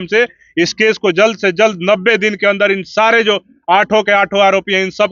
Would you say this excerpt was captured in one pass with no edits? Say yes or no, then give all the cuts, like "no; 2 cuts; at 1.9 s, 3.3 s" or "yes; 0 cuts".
yes; 0 cuts